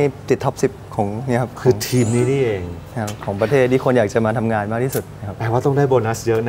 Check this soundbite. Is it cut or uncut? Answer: uncut